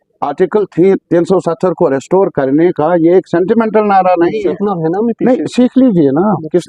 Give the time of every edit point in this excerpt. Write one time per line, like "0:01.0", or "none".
0:04.6